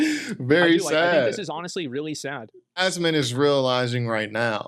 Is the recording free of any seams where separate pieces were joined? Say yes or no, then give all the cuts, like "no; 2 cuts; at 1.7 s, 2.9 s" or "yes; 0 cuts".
no; 1 cut; at 2.8 s